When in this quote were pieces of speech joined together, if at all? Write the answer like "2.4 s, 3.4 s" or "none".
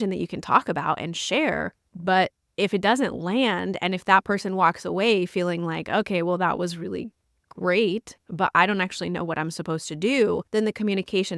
10.4 s